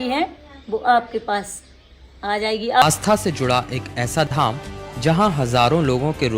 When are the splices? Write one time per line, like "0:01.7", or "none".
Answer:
0:02.8